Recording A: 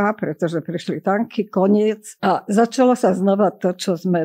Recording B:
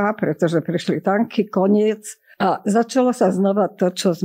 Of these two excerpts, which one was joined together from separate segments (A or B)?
A